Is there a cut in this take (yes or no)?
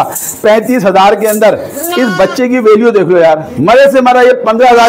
no